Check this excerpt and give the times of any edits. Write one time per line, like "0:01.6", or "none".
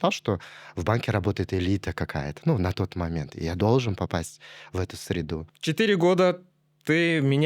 0:05.6

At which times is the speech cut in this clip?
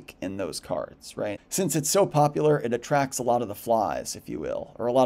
0:01.5

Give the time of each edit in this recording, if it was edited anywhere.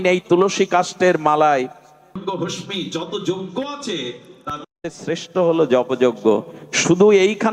0:02.2

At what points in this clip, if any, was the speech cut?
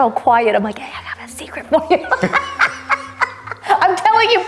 none

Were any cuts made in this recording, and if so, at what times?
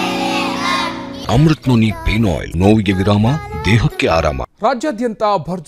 0:01.1
0:02.5
0:04.5

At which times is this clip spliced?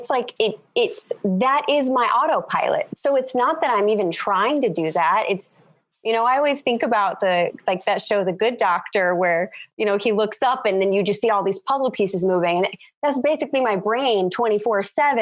none

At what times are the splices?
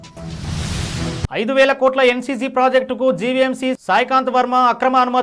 none

